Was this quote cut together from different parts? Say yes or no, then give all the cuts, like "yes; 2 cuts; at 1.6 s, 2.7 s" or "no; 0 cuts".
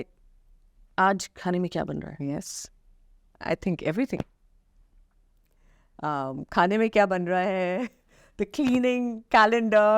no; 0 cuts